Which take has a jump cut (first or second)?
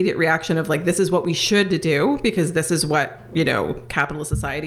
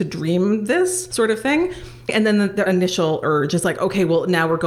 second